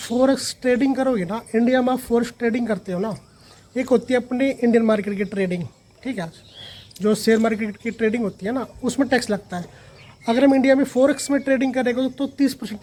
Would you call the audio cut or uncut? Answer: uncut